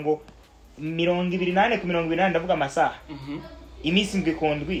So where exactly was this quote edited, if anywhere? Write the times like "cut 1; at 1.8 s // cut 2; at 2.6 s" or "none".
none